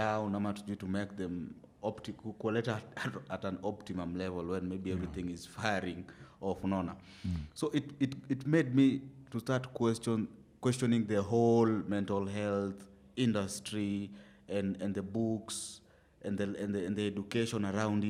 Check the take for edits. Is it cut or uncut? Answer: uncut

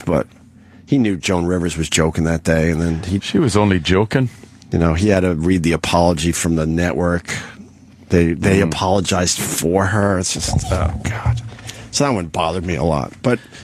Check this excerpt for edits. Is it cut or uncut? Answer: uncut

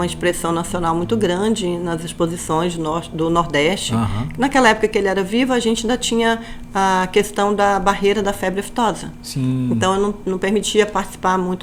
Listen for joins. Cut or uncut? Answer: uncut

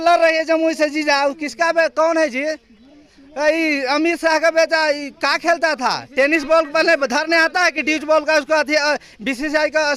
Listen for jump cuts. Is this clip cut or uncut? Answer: uncut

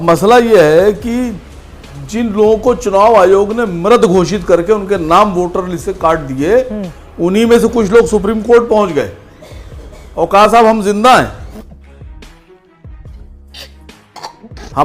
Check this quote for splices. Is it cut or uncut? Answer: uncut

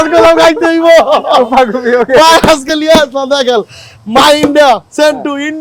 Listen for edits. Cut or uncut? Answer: uncut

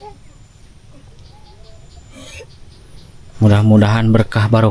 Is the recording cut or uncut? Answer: uncut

